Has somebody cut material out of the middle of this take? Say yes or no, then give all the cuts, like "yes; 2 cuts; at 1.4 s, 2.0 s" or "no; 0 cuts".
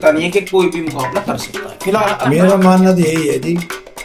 yes; 1 cut; at 2.2 s